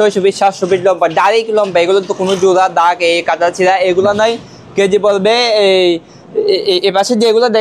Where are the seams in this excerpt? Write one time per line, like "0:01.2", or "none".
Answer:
none